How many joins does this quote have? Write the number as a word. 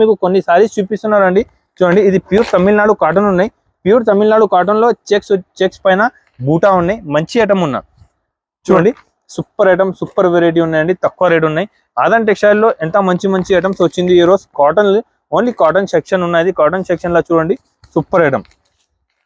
one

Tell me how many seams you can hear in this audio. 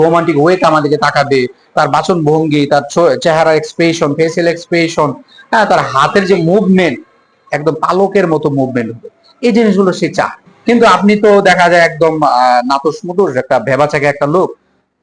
one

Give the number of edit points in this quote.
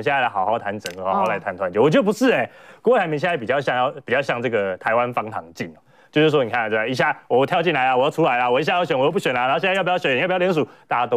one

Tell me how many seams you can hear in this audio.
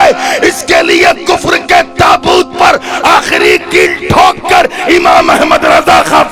zero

